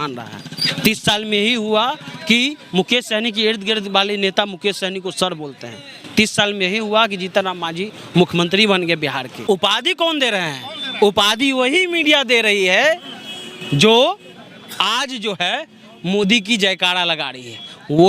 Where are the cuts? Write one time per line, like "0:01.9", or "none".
0:09.4